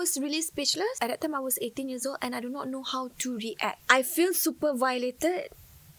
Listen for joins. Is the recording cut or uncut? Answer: cut